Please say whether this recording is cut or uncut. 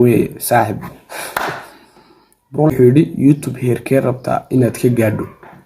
cut